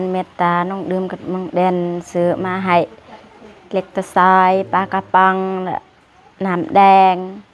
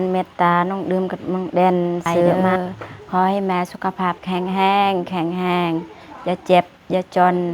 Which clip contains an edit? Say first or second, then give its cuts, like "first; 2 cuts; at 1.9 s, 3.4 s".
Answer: second; 1 cut; at 2.4 s